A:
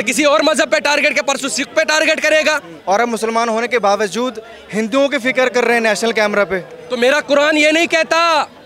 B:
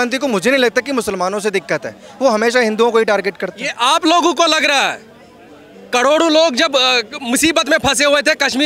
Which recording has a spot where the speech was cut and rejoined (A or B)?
A